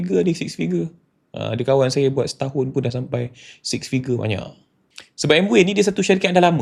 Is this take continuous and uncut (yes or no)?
no